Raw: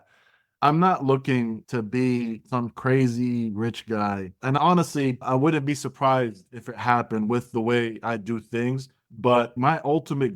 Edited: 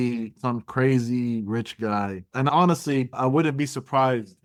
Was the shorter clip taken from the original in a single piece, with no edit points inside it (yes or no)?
yes